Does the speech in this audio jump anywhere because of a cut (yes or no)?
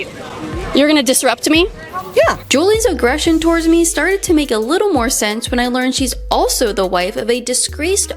no